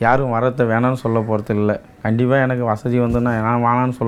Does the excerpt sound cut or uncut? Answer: uncut